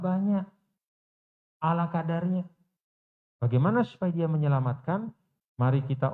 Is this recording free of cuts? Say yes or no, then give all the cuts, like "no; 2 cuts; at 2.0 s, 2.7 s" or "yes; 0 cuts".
yes; 0 cuts